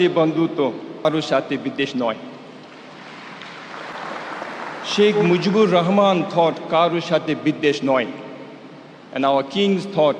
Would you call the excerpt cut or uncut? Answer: cut